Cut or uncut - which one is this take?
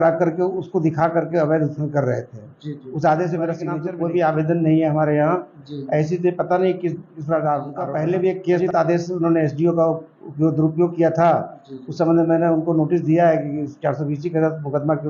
cut